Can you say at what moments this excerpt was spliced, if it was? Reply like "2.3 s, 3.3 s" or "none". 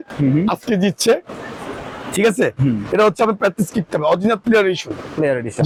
none